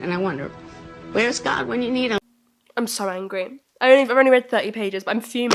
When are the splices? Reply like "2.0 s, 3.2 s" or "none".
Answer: 2.3 s